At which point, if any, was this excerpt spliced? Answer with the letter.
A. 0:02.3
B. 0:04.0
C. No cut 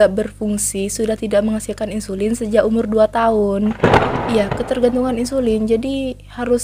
B